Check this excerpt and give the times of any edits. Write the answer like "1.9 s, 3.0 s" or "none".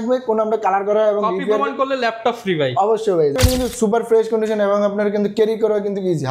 3.4 s